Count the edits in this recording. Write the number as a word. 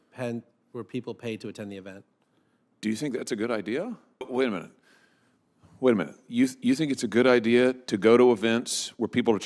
one